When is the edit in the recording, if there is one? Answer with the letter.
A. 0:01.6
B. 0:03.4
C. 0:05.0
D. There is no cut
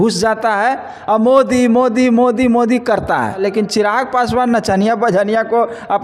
B